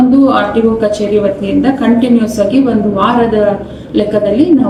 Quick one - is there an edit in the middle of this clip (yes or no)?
no